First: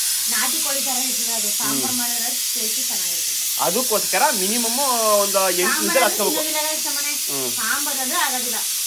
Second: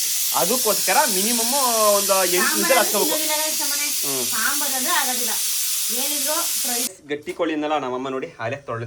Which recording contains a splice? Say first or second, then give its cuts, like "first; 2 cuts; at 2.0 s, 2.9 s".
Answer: second; 1 cut; at 6.9 s